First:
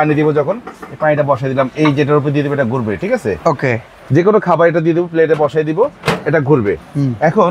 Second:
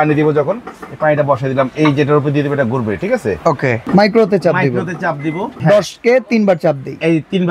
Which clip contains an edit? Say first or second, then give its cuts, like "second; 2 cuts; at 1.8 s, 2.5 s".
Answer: second; 2 cuts; at 3.8 s, 5.5 s